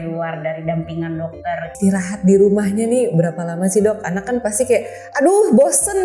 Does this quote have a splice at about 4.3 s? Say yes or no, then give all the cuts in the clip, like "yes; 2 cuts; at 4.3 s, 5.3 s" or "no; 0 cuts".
no; 1 cut; at 1.7 s